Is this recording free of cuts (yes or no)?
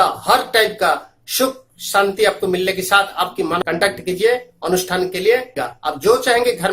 no